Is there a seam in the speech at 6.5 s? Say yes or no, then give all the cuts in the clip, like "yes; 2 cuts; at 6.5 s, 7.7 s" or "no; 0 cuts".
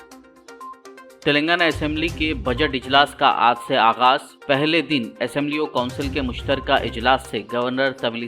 no; 1 cut; at 0.9 s